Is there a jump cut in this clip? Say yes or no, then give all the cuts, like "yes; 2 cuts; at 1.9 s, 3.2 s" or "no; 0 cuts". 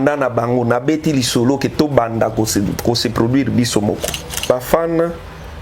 yes; 1 cut; at 4.4 s